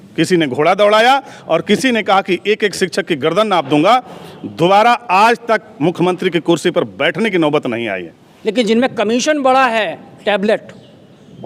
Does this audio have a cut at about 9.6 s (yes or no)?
no